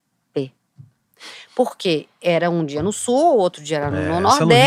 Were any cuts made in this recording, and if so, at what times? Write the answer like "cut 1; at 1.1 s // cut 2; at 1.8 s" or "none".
none